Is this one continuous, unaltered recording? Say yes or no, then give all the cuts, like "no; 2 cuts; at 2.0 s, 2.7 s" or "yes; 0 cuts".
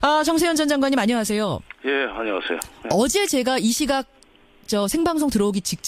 no; 1 cut; at 4.8 s